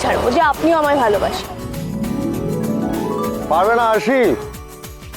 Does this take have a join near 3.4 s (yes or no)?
yes